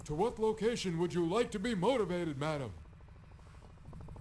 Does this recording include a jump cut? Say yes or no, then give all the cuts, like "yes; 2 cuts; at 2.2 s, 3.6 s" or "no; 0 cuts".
yes; 1 cut; at 2.9 s